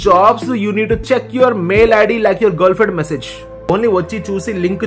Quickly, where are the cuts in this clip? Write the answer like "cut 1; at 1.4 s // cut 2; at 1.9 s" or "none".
cut 1; at 3.7 s